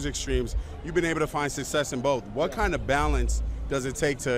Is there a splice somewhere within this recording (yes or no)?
no